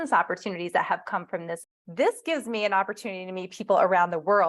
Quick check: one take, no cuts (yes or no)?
no